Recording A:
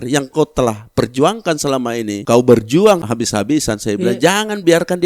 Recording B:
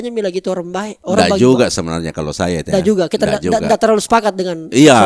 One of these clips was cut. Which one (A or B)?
A